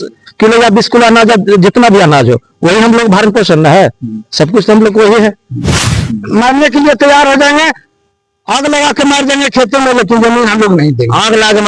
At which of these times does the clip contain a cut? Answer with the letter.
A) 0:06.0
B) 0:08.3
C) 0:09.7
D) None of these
A